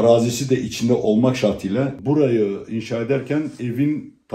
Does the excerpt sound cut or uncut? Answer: cut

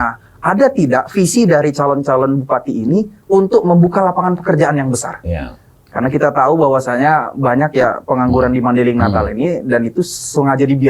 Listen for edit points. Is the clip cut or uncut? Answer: uncut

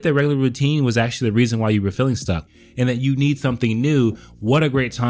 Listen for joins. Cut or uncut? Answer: cut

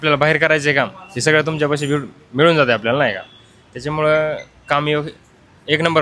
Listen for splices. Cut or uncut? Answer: uncut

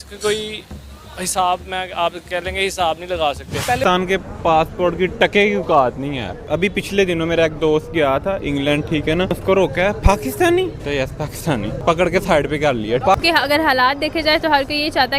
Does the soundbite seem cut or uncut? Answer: cut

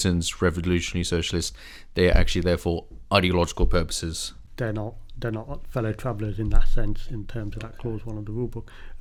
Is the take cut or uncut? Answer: uncut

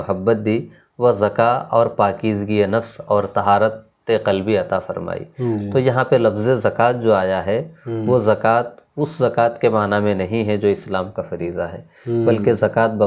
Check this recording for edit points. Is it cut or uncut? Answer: uncut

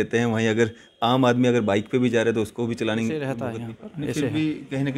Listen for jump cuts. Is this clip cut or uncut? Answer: cut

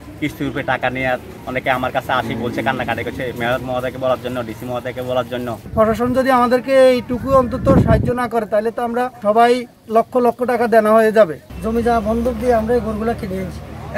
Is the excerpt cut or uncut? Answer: cut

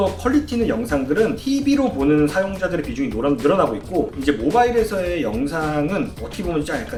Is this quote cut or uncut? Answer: uncut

